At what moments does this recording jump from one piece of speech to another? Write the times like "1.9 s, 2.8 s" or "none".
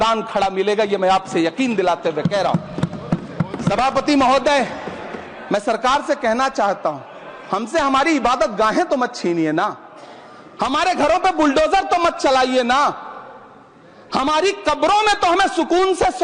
none